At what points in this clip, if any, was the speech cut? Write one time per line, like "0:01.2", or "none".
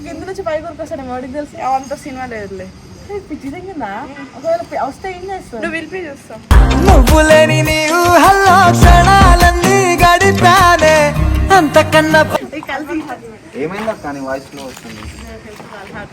0:12.4